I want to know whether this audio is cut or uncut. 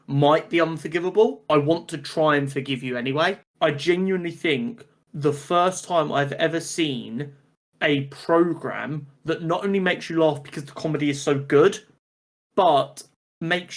cut